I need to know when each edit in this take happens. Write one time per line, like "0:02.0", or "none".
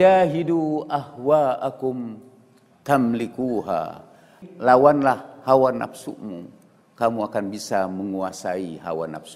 0:04.3